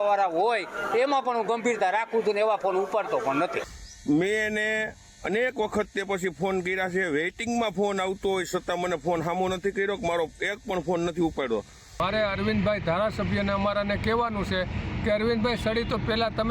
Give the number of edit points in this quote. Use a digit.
1